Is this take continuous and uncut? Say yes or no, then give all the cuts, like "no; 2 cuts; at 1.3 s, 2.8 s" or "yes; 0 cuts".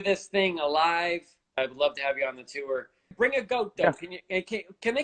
no; 2 cuts; at 1.6 s, 3.1 s